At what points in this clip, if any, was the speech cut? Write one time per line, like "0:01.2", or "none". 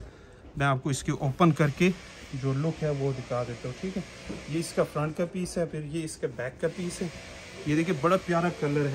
none